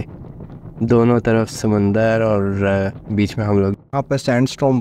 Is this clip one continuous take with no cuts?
no; 1 cut; at 3.8 s

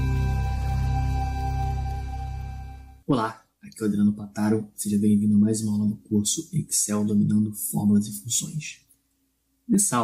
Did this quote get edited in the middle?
yes; 1 cut; at 6.1 s

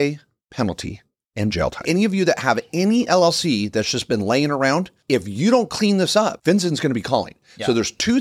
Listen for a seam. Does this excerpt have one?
yes; 3 cuts; at 1.8 s, 4.9 s, 6.4 s

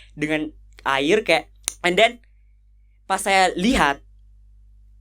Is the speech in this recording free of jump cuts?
no; 1 cut; at 1.6 s

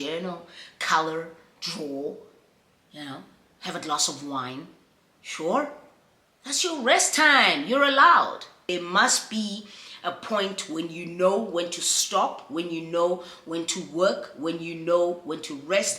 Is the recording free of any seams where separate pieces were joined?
no; 1 cut; at 8.5 s

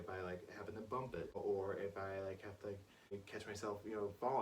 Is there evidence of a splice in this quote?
yes; 2 cuts; at 1.3 s, 3.2 s

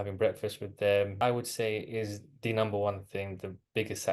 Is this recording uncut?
no; 1 cut; at 1.1 s

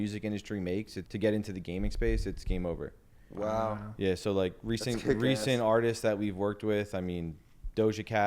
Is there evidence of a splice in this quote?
yes; 1 cut; at 1.0 s

